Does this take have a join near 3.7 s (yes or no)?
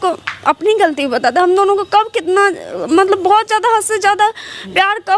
no